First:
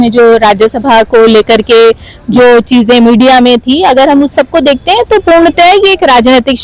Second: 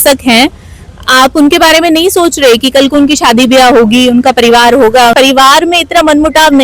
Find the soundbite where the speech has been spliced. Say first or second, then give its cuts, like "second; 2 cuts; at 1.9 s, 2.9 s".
second; 1 cut; at 5.1 s